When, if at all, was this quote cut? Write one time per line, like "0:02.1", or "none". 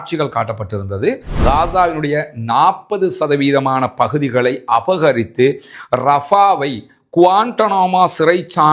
0:01.3